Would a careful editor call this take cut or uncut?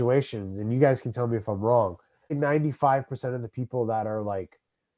cut